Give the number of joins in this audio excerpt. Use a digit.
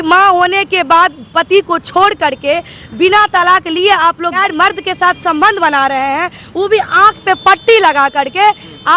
1